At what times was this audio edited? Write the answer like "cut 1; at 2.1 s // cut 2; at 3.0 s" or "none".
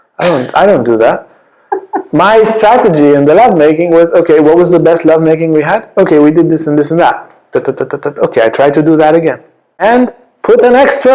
cut 1; at 9.8 s